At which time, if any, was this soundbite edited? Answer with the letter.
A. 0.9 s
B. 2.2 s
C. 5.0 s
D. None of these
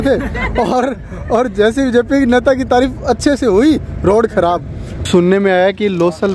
C